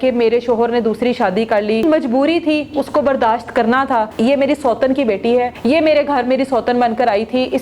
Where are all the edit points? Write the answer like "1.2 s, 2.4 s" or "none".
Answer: 1.8 s, 4.1 s, 5.5 s